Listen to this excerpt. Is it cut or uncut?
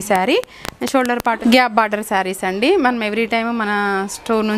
cut